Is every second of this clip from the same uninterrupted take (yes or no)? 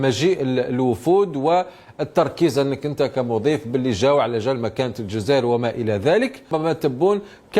no